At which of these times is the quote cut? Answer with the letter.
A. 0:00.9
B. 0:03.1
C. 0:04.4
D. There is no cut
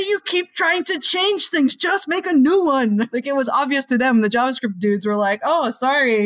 B